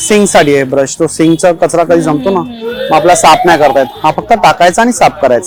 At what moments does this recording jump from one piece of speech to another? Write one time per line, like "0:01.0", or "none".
none

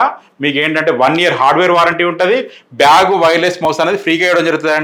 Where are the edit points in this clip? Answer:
none

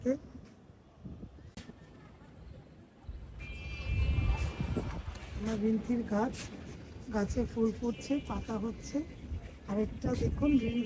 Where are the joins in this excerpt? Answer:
0:01.7

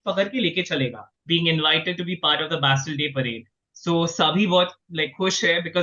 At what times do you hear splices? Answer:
0:01.1

